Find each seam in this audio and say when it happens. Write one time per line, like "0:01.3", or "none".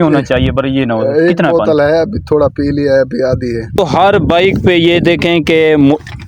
0:03.8